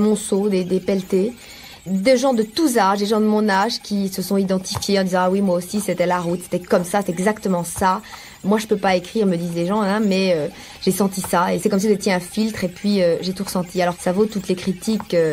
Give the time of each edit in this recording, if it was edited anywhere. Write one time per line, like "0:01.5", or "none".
0:01.9
0:06.6
0:08.4
0:11.6
0:14.0